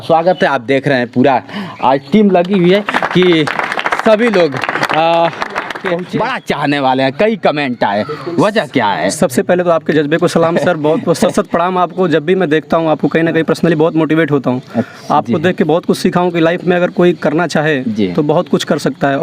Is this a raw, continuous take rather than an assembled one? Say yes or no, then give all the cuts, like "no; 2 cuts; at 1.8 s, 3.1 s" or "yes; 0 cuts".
no; 1 cut; at 5.9 s